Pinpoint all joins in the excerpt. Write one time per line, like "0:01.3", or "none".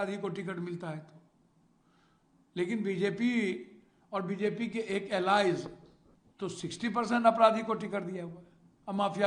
none